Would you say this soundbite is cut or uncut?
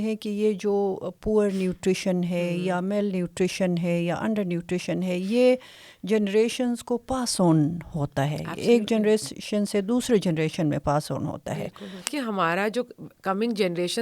cut